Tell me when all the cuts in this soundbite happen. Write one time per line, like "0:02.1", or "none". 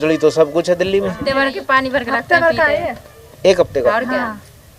0:01.2

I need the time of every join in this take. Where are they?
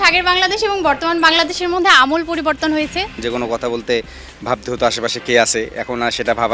0:03.2

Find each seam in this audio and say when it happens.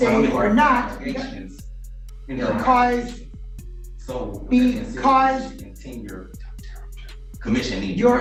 none

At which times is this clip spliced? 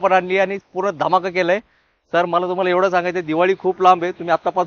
none

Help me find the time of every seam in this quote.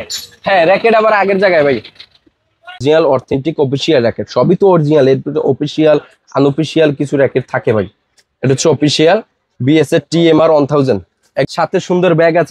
0:02.8
0:11.4

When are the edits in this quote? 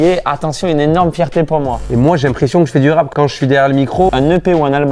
0:01.8
0:03.1
0:04.1

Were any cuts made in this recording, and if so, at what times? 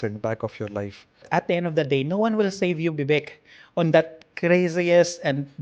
0:01.3

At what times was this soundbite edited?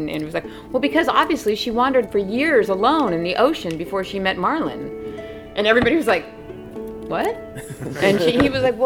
0:02.1

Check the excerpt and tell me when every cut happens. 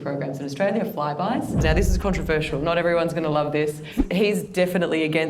0:01.6
0:04.0

